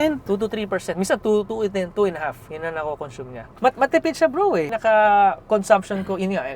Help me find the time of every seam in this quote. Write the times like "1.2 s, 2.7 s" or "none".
1.5 s, 3.5 s, 4.7 s

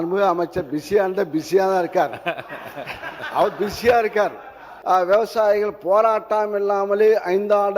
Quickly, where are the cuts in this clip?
4.7 s

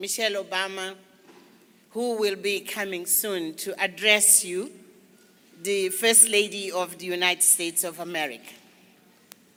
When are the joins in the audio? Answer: none

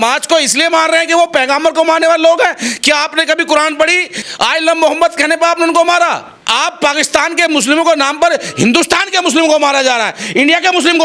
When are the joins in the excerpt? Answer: 4.2 s, 6.3 s

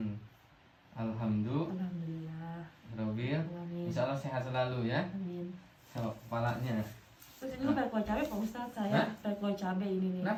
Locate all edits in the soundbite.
none

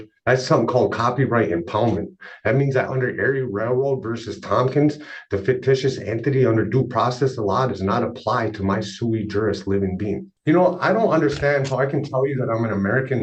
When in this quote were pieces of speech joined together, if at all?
10.2 s

